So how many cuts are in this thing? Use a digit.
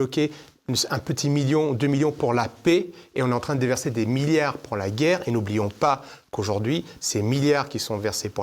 0